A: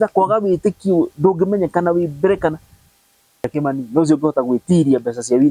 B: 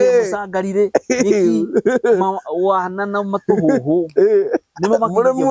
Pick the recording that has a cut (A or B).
A